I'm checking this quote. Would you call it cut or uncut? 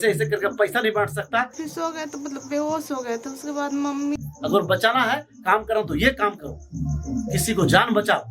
cut